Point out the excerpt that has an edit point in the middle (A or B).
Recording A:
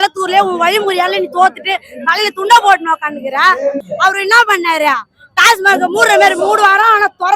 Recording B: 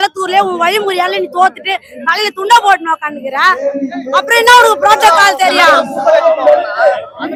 A